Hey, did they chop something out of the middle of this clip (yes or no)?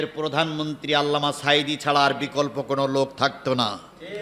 no